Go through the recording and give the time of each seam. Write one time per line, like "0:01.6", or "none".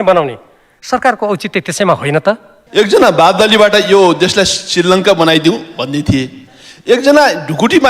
0:02.5